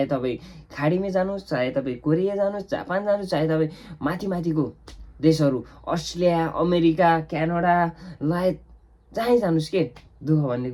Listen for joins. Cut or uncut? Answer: uncut